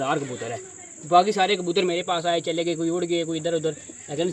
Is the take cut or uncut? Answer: uncut